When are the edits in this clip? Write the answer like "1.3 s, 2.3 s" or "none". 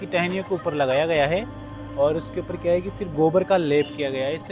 none